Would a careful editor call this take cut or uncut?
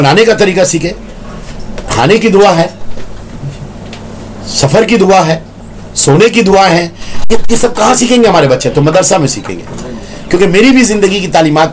uncut